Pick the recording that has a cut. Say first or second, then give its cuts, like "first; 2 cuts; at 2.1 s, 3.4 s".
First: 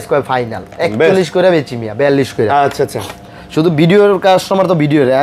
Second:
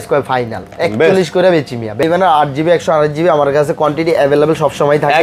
second; 1 cut; at 2.0 s